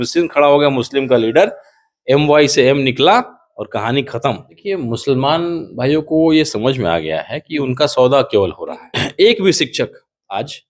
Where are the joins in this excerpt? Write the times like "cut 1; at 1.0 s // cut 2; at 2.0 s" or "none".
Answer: cut 1; at 4.6 s // cut 2; at 9.0 s